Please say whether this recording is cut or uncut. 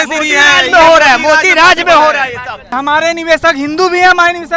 cut